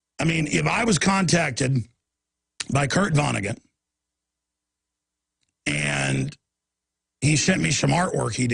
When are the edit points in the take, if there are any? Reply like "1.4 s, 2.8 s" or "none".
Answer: none